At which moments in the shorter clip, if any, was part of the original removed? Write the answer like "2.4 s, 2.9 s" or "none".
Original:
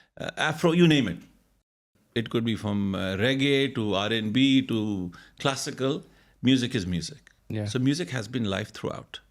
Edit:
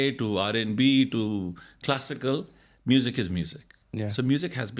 none